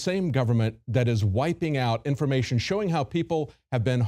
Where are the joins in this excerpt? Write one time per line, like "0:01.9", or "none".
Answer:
none